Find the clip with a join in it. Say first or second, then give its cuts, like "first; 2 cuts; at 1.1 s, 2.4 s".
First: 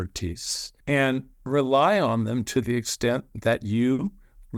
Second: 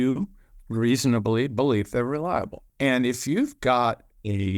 second; 1 cut; at 2.7 s